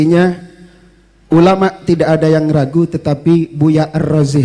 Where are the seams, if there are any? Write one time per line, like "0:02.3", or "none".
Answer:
none